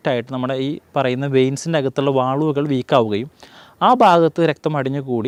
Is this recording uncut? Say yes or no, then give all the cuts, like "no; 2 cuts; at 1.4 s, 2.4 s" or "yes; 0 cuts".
yes; 0 cuts